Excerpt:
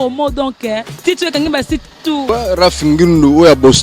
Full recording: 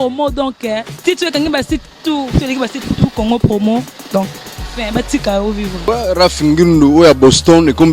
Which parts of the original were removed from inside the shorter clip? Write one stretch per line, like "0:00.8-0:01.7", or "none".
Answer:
0:02.2-0:05.8